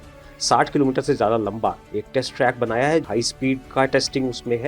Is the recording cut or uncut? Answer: cut